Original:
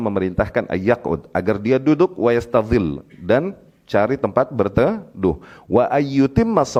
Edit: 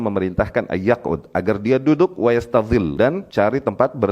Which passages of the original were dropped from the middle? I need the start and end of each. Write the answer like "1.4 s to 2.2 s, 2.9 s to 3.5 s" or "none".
3.1 s to 3.7 s